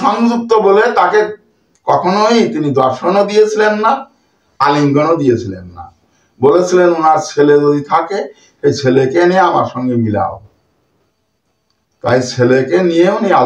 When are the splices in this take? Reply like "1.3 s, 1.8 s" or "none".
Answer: none